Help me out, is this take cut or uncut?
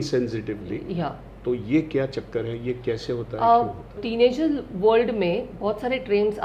cut